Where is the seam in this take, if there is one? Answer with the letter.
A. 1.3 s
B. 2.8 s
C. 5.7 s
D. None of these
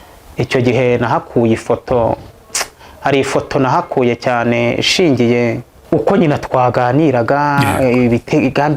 C